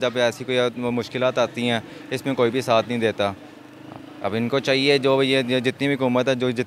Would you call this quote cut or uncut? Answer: uncut